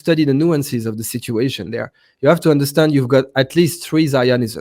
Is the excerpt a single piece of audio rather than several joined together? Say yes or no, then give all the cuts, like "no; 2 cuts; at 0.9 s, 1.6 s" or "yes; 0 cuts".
yes; 0 cuts